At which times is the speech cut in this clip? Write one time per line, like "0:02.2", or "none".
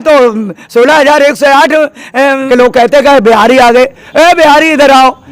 0:02.4